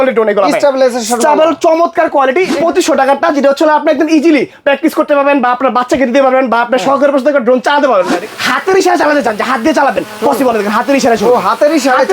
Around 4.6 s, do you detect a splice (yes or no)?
no